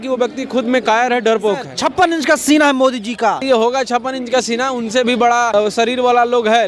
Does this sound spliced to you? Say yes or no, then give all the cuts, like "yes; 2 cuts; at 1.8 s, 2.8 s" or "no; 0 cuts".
yes; 3 cuts; at 1.8 s, 3.5 s, 5.5 s